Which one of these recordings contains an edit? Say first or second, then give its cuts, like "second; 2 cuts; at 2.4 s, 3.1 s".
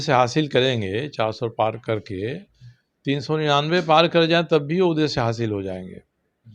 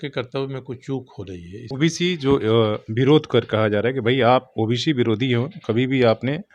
second; 1 cut; at 1.5 s